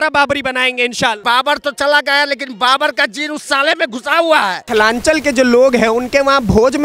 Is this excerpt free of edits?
no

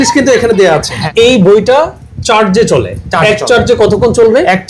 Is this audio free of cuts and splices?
no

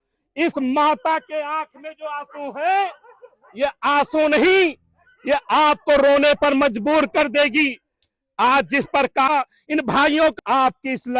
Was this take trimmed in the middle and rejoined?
yes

